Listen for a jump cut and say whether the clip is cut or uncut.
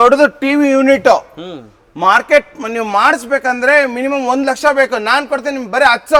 uncut